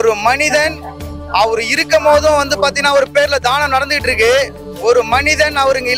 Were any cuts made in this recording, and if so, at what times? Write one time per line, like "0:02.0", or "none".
none